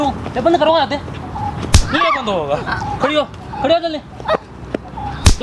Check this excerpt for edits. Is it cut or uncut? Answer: uncut